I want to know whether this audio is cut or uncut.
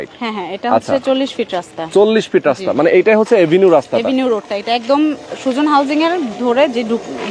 uncut